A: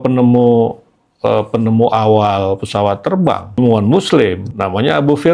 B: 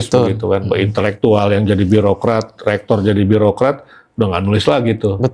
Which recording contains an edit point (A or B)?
A